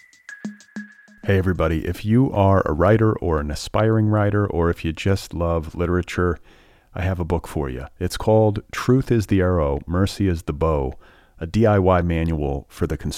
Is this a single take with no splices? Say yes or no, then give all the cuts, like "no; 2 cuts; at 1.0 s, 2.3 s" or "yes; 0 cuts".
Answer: no; 1 cut; at 0.9 s